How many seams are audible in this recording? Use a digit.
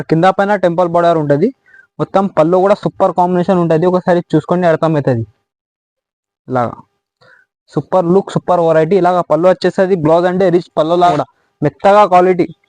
1